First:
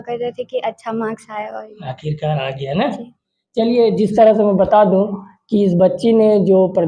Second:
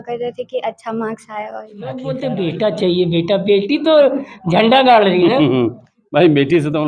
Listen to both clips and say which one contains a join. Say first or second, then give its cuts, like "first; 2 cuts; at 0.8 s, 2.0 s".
second; 1 cut; at 2.0 s